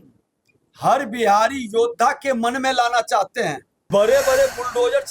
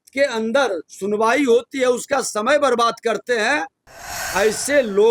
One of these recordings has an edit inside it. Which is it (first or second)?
first